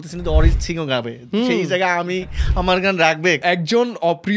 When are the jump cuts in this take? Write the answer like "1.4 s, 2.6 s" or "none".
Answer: 3.4 s